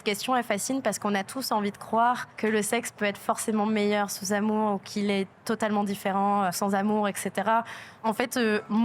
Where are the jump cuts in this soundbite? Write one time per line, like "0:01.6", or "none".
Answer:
0:02.3
0:06.6
0:07.8